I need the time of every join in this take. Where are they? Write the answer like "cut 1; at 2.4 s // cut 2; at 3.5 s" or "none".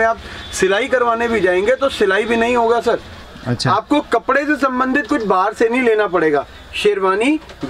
cut 1; at 3.4 s